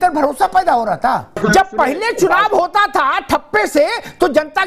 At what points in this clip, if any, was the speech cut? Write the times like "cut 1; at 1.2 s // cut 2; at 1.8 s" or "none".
cut 1; at 1.4 s